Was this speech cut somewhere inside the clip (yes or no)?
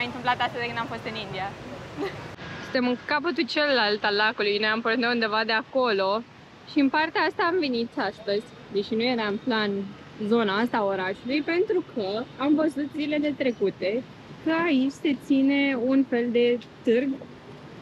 no